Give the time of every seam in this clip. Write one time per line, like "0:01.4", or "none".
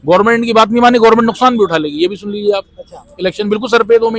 none